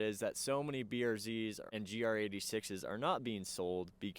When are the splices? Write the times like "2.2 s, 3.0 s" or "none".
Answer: 1.6 s